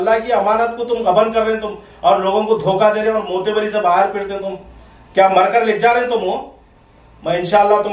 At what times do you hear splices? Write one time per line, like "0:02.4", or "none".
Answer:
none